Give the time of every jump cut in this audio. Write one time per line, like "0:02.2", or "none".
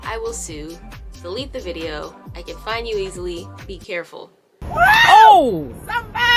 none